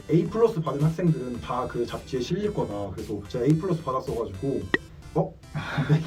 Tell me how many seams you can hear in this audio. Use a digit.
0